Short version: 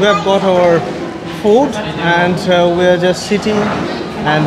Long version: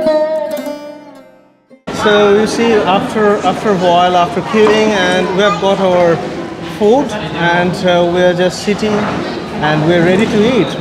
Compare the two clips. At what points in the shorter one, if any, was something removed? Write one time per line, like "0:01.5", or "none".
none